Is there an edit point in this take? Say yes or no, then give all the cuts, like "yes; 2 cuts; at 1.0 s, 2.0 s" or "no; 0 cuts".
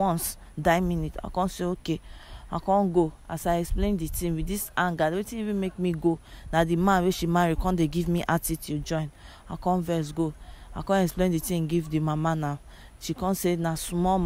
no; 0 cuts